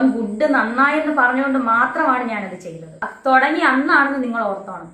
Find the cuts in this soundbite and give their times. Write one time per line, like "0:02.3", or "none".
0:03.0